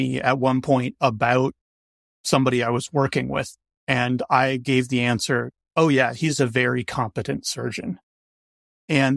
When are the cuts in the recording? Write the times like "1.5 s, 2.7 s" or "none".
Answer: 2.2 s

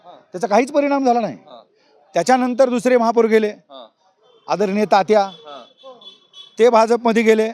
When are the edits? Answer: none

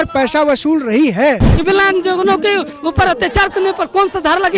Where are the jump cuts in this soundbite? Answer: 1.5 s

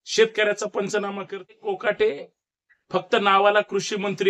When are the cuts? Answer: 1.5 s

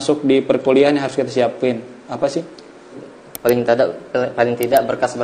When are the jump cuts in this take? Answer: 3.0 s

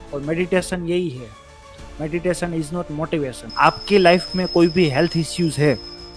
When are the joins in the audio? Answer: 3.4 s

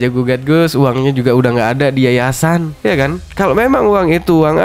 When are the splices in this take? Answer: 2.8 s

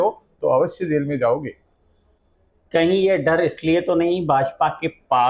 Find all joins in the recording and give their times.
none

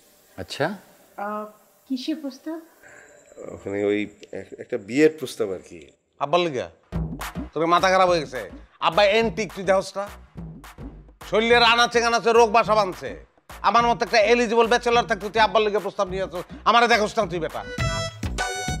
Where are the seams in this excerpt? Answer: 17.8 s

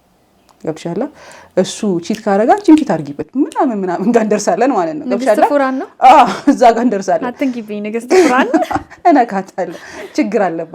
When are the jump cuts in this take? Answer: none

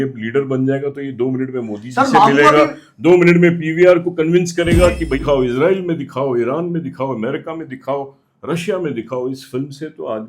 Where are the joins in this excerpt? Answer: 5.2 s

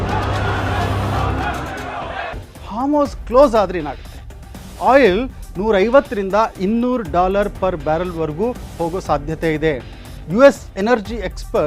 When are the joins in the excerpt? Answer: 2.3 s

